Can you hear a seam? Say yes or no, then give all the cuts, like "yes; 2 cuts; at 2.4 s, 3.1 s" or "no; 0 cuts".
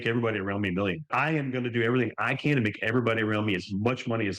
yes; 1 cut; at 1.1 s